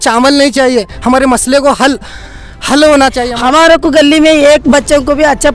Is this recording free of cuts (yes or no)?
no